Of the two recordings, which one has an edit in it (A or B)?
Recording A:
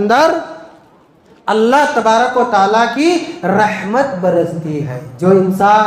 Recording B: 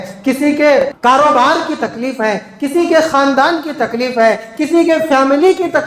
B